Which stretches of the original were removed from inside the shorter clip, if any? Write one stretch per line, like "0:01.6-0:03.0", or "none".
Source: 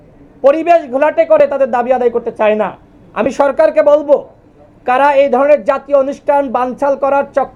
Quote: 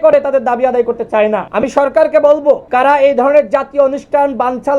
0:02.7-0:03.1
0:04.3-0:04.8